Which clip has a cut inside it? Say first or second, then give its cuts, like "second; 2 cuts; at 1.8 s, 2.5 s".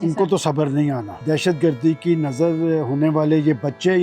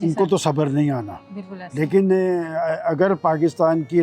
first; 1 cut; at 1.2 s